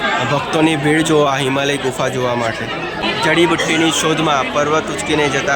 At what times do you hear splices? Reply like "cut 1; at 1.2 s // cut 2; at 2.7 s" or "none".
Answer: cut 1; at 2.9 s